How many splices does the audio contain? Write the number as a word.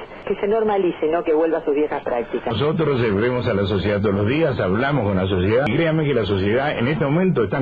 two